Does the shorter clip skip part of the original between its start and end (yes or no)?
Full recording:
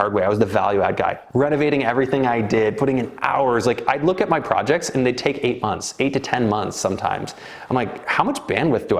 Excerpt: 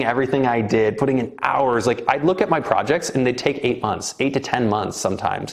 no